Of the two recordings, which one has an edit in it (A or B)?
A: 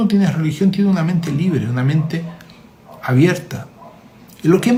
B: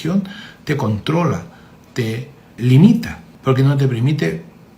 B